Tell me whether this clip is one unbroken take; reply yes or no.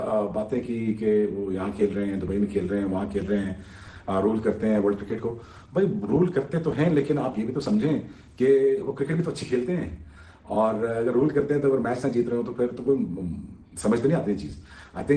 yes